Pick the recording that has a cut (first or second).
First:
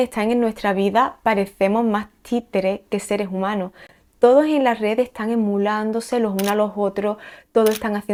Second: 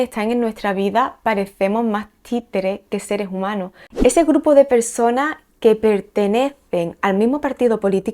second